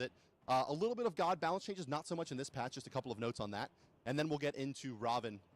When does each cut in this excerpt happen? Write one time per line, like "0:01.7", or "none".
0:04.5